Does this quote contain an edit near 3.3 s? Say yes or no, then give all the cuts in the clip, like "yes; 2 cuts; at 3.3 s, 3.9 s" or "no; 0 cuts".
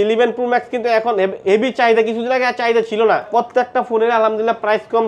yes; 1 cut; at 3.3 s